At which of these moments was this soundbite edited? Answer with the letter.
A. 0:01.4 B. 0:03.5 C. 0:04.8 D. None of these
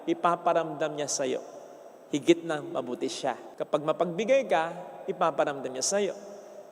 D